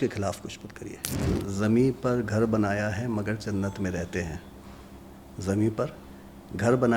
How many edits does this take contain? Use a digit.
1